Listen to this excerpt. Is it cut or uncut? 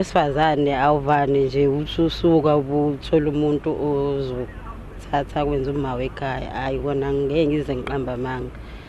uncut